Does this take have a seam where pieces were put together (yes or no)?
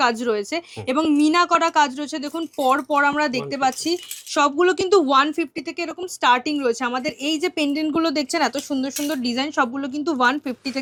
no